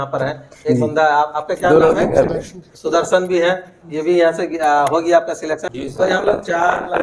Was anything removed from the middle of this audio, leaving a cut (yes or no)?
yes